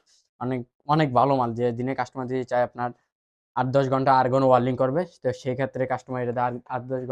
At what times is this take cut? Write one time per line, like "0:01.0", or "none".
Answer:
none